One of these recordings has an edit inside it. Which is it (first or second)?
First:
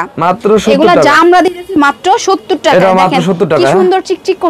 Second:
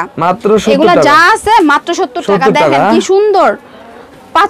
first